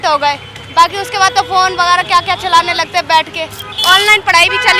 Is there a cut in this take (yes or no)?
yes